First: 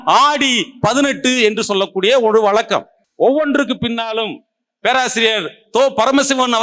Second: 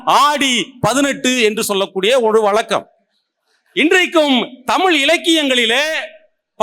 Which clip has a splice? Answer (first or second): first